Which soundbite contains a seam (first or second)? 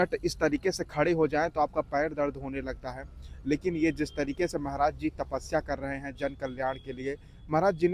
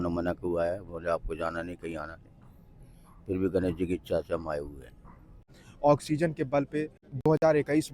second